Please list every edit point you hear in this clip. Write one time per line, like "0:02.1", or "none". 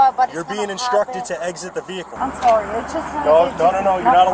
0:02.1